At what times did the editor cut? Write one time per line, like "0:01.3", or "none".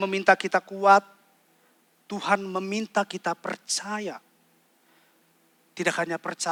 none